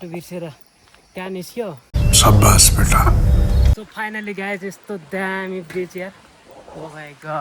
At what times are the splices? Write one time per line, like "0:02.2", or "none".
0:01.8
0:03.9